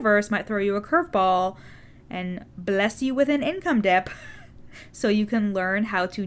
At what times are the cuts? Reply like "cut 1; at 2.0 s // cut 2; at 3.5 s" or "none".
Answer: none